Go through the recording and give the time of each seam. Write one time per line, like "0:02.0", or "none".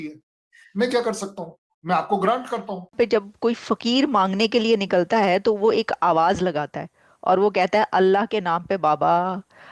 0:02.9

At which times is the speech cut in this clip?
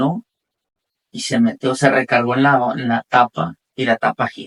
none

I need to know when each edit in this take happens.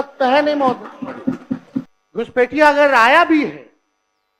0:02.0

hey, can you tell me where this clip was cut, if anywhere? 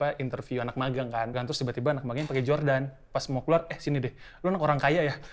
0:01.3

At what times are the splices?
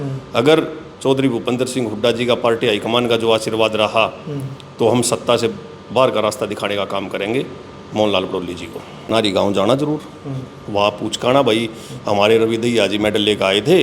0:09.1

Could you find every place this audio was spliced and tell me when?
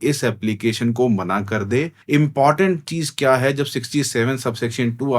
0:02.0

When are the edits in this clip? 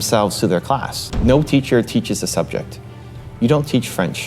0:01.0

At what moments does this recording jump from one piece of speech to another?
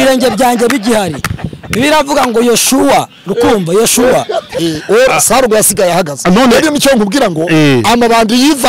0:04.5

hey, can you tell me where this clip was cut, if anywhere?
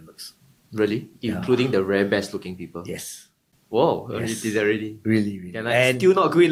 none

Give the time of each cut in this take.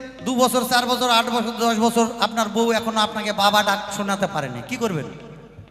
0:03.4

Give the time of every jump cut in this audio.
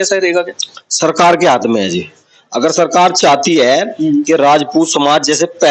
none

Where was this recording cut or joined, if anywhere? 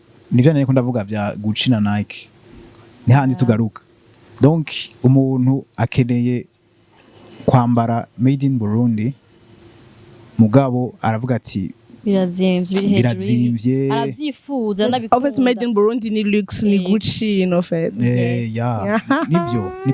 none

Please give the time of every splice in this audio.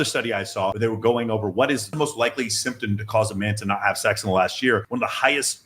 0:00.8
0:01.9

